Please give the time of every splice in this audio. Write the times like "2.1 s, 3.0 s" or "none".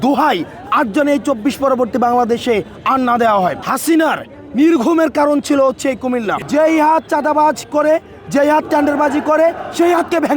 3.7 s, 6.3 s